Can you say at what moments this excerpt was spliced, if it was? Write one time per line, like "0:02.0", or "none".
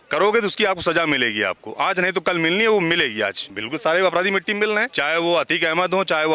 0:03.4
0:04.9